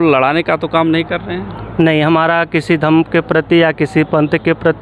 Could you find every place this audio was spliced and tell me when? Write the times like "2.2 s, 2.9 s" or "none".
none